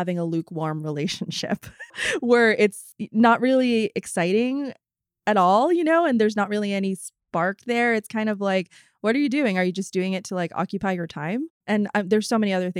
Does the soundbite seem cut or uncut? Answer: cut